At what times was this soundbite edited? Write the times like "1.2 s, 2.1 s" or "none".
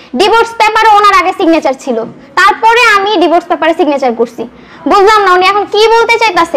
none